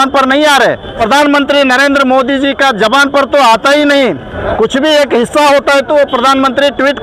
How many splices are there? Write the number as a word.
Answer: two